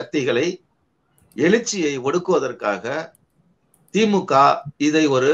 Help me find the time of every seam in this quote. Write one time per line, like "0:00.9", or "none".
none